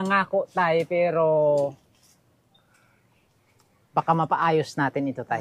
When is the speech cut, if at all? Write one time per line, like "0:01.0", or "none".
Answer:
none